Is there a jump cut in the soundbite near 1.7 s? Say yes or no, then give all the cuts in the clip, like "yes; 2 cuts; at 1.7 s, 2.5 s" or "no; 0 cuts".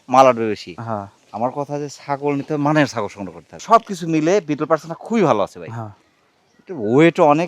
no; 1 cut; at 3.5 s